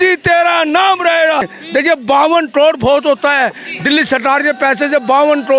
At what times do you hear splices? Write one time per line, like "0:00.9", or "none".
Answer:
0:01.6

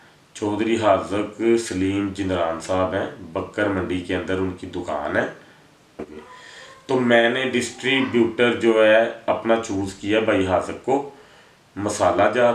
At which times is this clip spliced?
0:06.2

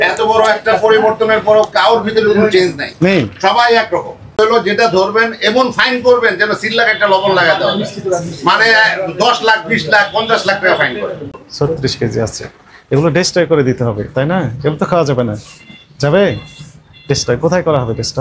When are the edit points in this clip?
0:04.4
0:11.3

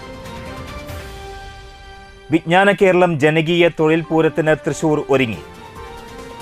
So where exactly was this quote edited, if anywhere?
0:01.1

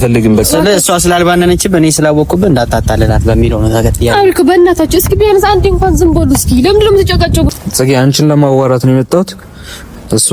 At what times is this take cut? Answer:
0:07.6

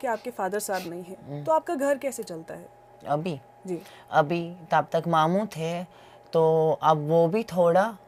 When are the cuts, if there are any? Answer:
none

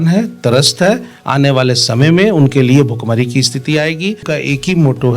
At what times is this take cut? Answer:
0:04.3

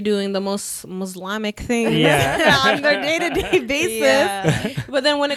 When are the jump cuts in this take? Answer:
none

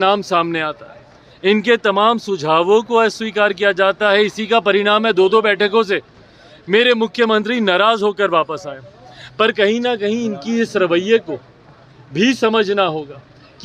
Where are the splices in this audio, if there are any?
none

